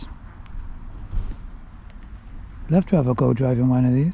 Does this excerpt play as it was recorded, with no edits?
yes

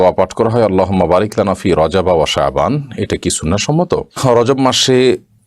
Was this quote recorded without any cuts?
no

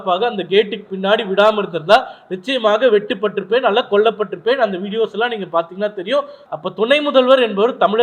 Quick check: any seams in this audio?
yes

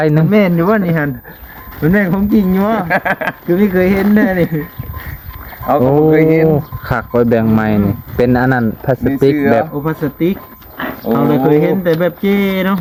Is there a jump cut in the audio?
no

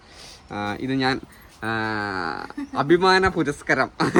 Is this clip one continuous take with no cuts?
yes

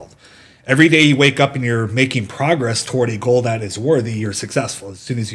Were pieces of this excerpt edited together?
no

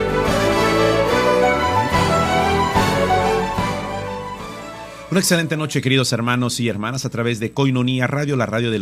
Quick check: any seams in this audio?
yes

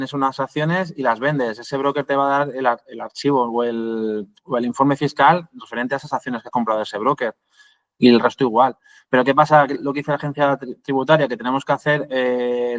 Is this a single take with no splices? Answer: yes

